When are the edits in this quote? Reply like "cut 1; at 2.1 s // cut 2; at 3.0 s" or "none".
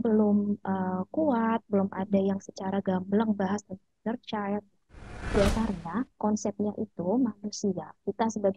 cut 1; at 5.4 s